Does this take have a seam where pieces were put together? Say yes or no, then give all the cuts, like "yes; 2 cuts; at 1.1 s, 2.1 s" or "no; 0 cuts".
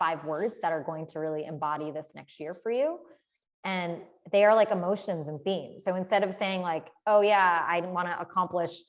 no; 0 cuts